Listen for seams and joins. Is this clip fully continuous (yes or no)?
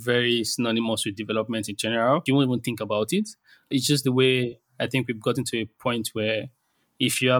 no